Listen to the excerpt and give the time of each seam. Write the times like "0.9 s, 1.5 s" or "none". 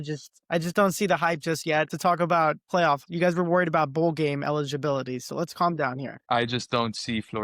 1.9 s, 2.7 s, 6.2 s